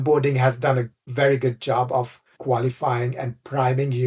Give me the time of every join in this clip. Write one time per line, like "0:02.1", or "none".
0:01.0
0:02.2